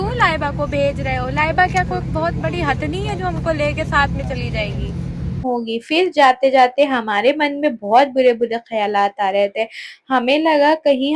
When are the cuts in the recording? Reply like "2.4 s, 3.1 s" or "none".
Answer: 5.4 s